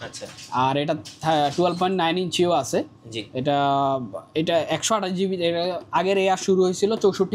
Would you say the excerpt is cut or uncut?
uncut